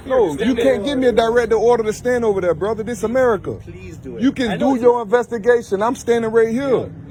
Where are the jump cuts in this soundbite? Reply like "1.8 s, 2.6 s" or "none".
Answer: none